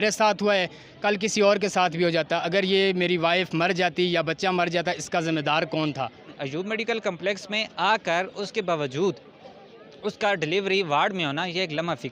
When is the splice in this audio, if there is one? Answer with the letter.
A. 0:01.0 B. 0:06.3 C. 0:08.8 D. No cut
B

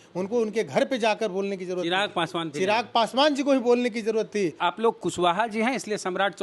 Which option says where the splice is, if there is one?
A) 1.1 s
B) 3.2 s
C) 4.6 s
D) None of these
C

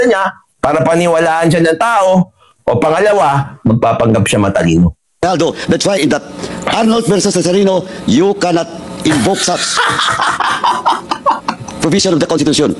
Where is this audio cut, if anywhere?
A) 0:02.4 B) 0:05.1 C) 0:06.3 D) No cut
B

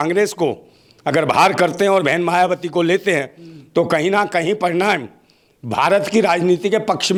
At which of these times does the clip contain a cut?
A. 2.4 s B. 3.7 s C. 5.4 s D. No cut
D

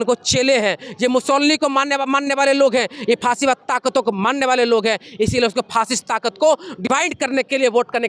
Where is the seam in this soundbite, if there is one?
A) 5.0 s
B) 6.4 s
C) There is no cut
C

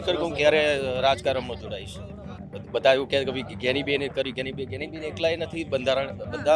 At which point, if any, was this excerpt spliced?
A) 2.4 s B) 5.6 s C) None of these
A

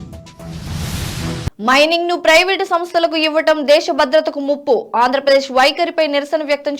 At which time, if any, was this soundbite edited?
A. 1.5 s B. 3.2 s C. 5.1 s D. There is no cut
A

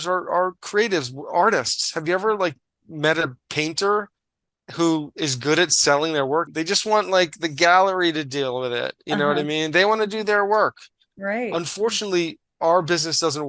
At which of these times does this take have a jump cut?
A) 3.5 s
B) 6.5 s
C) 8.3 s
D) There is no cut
B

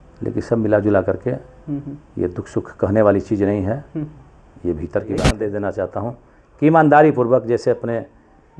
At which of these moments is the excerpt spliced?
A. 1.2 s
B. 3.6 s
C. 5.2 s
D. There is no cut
C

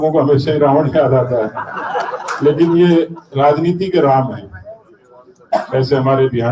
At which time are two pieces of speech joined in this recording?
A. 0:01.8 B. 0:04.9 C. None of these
C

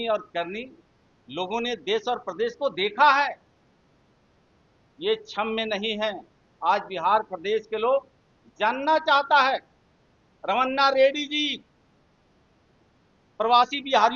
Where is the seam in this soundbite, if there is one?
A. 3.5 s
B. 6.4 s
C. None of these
C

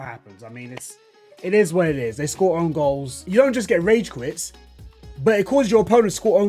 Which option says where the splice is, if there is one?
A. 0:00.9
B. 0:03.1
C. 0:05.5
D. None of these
B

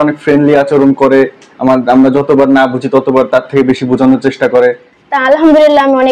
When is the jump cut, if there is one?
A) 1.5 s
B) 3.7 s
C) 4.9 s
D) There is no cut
C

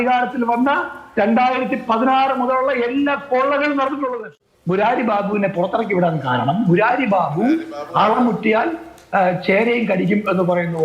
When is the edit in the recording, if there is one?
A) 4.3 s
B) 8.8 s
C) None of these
A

